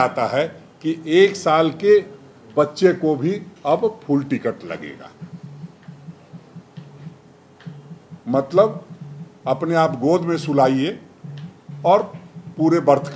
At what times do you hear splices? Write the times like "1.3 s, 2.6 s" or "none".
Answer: none